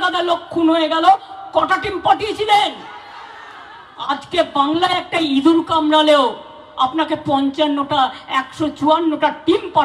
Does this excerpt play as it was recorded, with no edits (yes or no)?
yes